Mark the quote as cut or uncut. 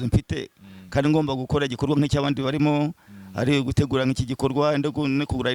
uncut